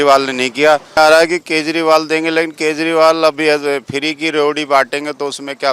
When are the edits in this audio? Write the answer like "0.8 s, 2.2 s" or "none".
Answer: 1.0 s